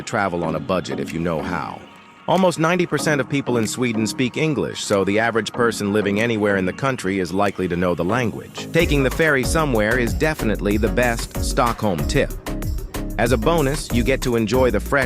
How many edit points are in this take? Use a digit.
1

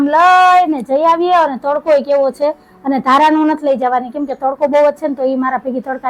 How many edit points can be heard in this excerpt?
0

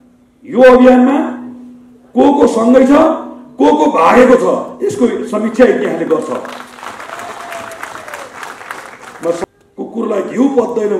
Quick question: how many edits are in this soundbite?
1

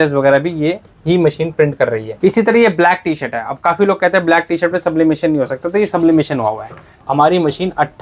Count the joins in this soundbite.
2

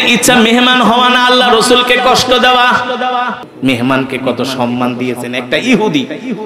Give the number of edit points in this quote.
1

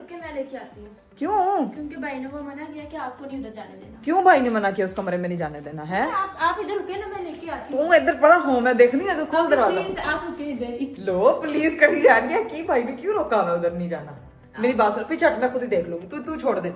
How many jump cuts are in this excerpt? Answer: 0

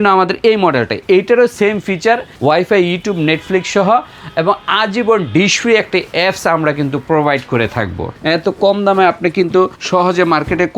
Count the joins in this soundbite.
4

